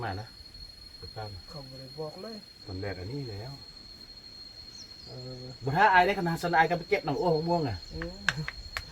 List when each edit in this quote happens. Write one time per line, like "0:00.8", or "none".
0:02.7